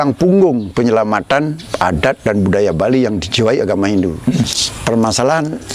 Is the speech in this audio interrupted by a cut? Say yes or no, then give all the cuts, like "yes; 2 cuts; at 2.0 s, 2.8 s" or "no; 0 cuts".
yes; 1 cut; at 4.5 s